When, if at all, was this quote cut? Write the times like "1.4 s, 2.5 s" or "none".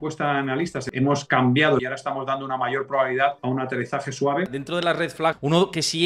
0.8 s, 1.8 s, 3.4 s, 5.1 s